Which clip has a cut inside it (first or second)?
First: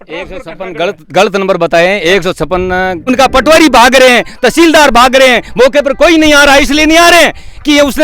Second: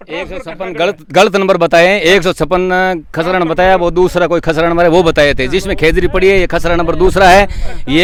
first